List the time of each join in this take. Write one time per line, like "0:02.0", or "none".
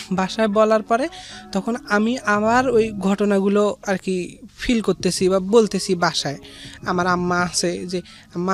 none